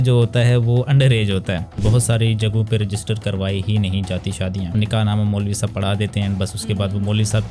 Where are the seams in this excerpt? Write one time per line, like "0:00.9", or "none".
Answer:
0:01.7
0:04.9